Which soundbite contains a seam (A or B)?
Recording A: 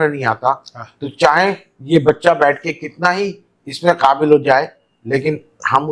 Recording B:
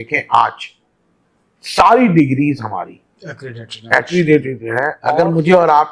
B